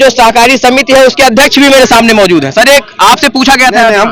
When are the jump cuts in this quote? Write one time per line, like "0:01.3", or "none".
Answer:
none